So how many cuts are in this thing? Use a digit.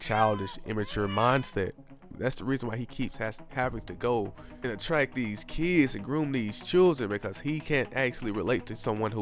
1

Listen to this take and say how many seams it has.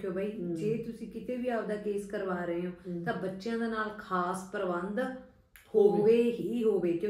0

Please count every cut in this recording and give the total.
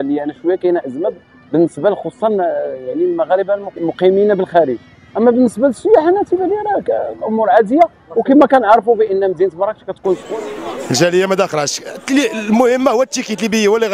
1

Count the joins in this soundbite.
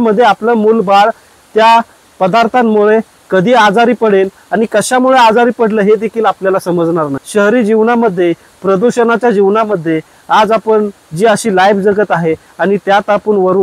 1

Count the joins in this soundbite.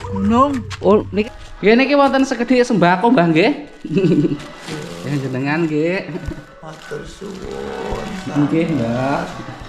1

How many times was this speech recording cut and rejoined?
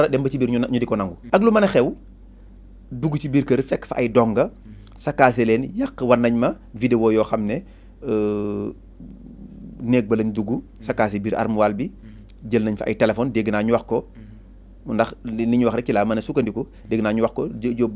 1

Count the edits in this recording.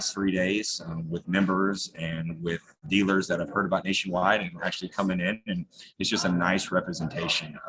0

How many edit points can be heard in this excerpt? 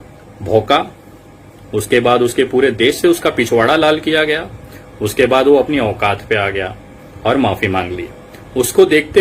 0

